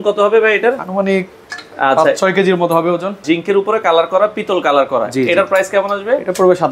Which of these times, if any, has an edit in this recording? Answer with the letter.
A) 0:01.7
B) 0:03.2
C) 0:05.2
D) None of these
B